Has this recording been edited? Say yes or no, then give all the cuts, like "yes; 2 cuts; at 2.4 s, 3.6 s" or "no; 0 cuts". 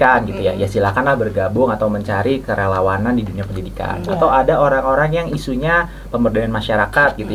no; 0 cuts